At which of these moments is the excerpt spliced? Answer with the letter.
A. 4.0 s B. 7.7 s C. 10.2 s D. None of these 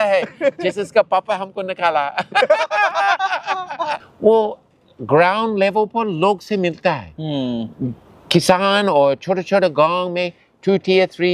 A